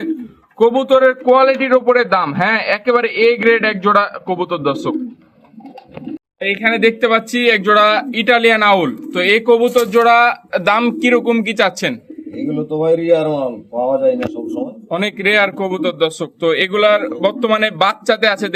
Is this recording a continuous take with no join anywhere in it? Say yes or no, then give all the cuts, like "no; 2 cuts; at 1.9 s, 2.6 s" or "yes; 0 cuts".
yes; 0 cuts